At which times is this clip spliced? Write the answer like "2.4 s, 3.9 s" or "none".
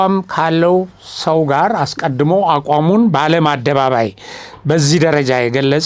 none

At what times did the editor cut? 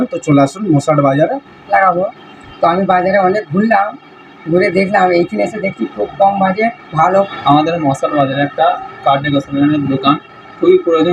1.7 s, 7.3 s

